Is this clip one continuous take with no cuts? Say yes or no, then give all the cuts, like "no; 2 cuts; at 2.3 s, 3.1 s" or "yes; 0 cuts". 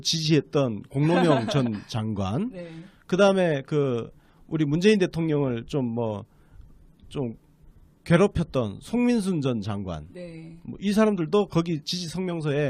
no; 1 cut; at 7.0 s